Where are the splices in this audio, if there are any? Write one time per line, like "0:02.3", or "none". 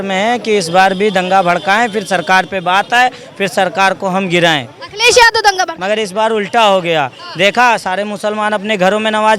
none